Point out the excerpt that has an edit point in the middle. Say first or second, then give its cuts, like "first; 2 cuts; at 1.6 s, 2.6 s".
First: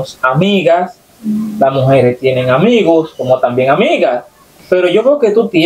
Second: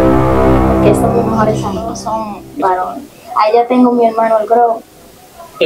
second; 1 cut; at 2.0 s